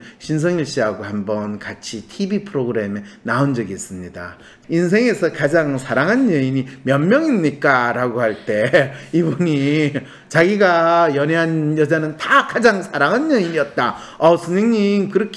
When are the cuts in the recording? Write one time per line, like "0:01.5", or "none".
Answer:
0:04.5